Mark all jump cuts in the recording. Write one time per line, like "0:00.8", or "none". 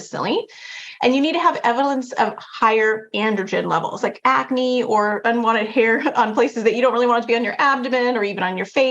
0:04.0
0:05.2